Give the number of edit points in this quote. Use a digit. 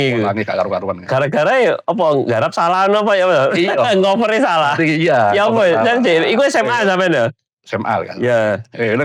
0